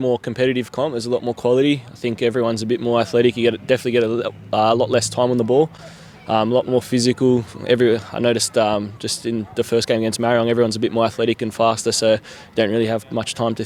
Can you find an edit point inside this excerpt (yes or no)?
no